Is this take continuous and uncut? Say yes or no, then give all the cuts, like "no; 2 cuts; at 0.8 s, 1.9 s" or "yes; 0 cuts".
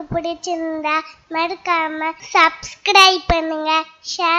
no; 1 cut; at 2.2 s